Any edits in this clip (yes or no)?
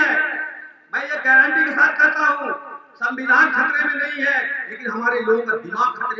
no